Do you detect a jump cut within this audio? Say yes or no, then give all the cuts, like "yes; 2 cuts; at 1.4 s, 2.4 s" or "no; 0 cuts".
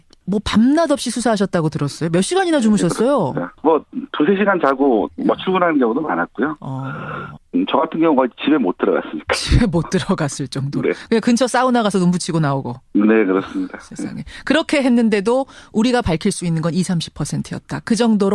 no; 0 cuts